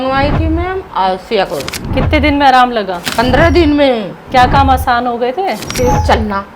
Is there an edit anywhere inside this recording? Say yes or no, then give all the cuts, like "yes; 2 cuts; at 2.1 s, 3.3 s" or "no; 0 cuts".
yes; 4 cuts; at 1.8 s, 3.0 s, 4.2 s, 5.6 s